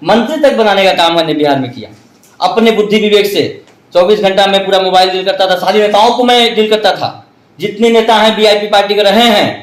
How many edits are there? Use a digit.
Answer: 0